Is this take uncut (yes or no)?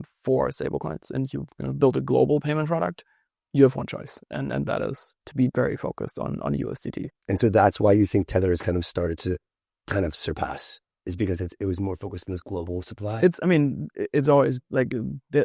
yes